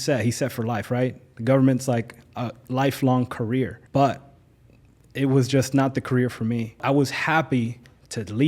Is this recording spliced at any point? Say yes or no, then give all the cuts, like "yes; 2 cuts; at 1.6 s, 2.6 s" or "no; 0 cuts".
yes; 2 cuts; at 3.8 s, 6.8 s